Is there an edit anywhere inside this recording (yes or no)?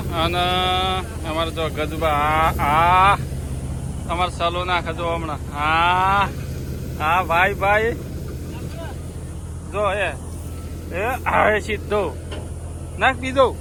no